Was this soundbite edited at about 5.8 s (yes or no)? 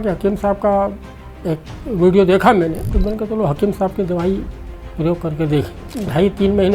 yes